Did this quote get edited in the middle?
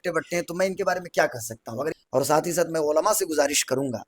yes; 1 cut; at 1.9 s

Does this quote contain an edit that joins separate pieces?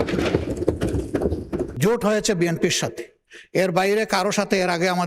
yes; 1 cut; at 1.7 s

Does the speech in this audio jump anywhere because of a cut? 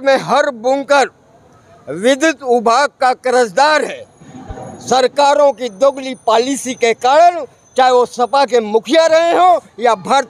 no; 0 cuts

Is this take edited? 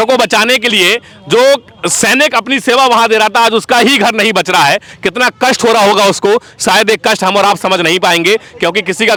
no; 0 cuts

